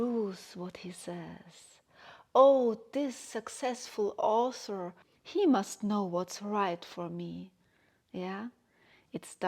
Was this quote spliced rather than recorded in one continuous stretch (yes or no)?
yes